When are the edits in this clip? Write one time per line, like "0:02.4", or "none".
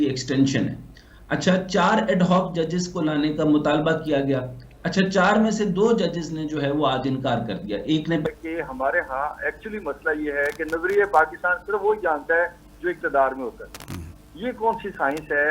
0:08.3